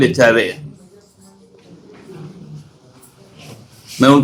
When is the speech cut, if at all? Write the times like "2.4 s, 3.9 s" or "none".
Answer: none